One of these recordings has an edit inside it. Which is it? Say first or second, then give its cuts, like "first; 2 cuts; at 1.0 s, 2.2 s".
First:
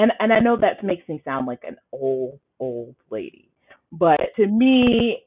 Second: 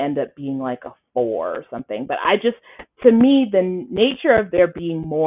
first; 1 cut; at 4.3 s